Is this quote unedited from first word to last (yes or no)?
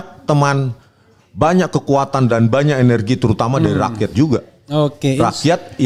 yes